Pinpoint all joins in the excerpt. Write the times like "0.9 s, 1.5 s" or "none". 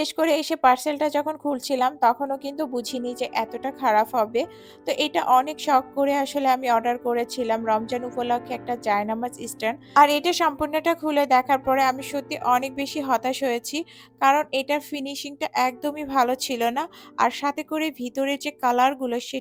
none